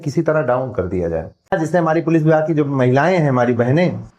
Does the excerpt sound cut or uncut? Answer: cut